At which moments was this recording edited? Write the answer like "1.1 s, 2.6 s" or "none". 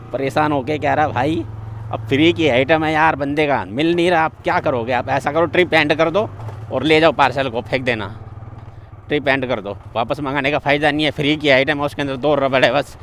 none